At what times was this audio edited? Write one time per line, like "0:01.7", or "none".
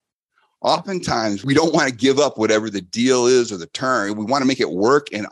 0:01.4